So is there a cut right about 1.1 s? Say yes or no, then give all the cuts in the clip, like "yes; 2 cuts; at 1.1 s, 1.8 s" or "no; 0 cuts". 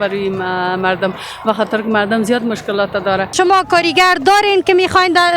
no; 1 cut; at 3.3 s